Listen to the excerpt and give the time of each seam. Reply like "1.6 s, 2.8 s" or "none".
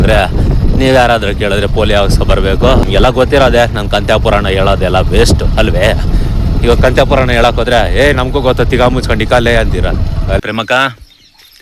2.8 s, 10.4 s